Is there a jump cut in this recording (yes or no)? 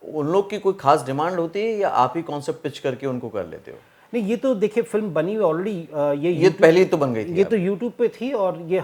no